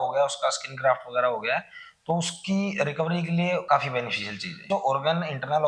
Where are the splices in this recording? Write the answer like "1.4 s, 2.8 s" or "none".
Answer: 3.6 s, 4.6 s